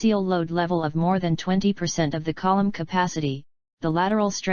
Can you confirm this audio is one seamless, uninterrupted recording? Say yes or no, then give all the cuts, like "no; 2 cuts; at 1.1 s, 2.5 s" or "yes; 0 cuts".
yes; 0 cuts